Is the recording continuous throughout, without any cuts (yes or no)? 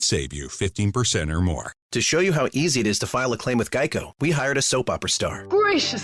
no